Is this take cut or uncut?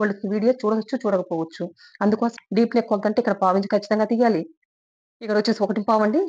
cut